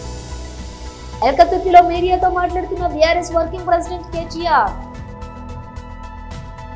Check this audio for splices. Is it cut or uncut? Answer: cut